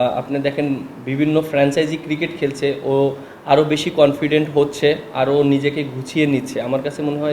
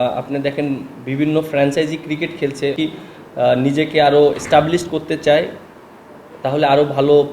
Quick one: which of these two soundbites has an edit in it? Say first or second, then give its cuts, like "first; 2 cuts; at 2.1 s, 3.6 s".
second; 1 cut; at 2.8 s